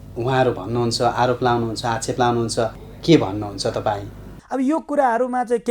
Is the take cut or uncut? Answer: cut